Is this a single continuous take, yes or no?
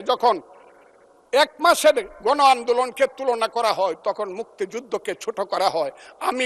yes